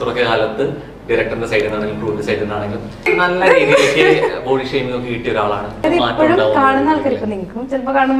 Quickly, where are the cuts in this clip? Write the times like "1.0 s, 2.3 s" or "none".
3.1 s, 5.8 s